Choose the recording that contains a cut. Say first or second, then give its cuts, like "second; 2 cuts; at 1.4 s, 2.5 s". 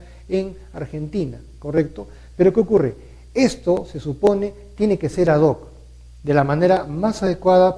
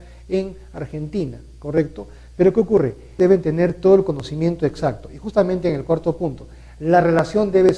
first; 1 cut; at 3.0 s